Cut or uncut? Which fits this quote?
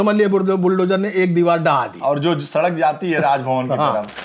uncut